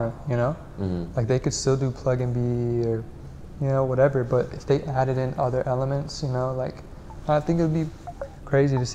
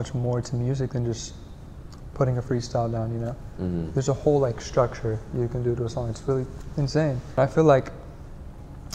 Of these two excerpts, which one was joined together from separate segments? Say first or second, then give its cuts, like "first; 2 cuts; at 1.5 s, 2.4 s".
second; 1 cut; at 7.3 s